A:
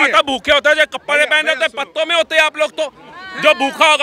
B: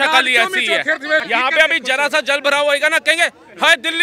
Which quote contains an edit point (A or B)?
B